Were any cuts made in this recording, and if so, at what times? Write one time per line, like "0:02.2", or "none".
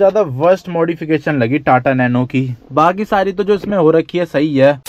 none